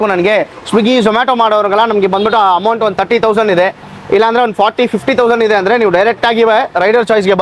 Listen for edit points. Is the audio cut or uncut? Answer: uncut